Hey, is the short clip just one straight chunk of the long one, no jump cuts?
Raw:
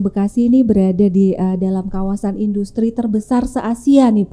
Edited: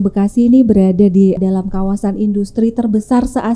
no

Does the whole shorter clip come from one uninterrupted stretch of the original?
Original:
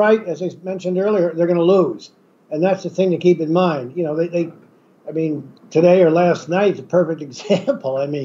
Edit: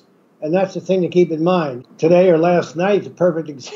no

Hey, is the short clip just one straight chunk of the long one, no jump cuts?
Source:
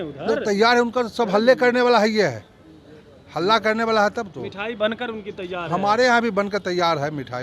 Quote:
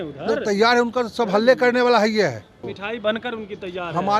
no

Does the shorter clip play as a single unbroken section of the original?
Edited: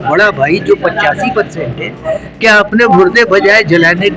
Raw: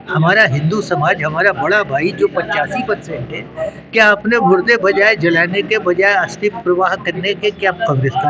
yes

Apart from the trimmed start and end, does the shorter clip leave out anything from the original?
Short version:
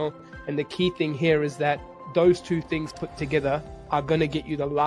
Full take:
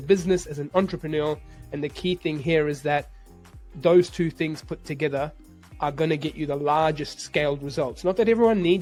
yes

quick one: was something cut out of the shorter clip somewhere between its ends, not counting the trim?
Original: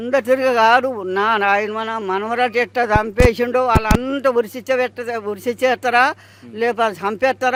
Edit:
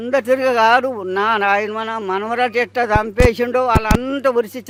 no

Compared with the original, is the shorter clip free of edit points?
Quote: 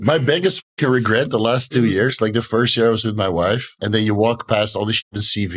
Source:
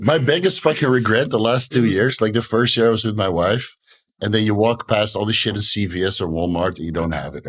no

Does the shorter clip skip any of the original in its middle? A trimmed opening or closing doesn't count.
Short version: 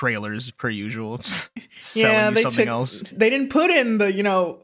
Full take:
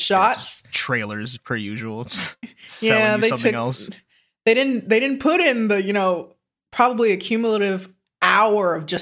yes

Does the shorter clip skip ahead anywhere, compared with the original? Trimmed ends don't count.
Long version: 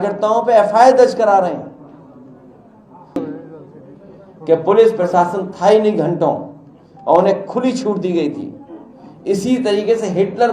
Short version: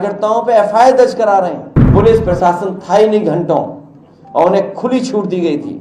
yes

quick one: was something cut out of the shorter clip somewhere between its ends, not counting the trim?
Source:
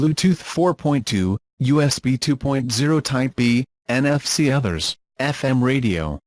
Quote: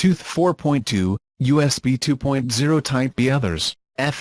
yes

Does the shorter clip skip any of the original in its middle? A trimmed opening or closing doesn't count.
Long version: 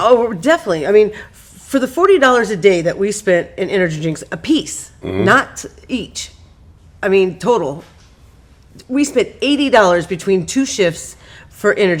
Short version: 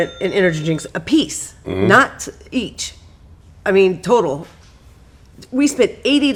no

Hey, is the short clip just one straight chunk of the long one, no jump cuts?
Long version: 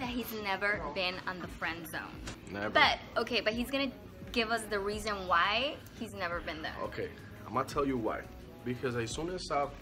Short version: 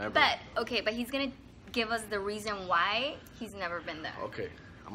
yes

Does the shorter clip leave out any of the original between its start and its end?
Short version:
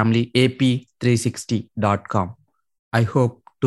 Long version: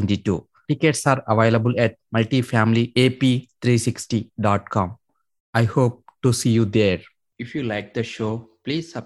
no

